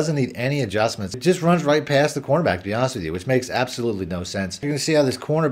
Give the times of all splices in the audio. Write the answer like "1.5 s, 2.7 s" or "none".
1.2 s, 4.7 s